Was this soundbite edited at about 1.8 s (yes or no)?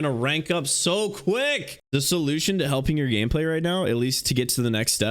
yes